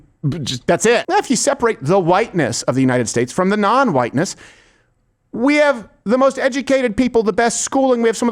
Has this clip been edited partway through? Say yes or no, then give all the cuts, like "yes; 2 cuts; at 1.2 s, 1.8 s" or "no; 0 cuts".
yes; 1 cut; at 1.1 s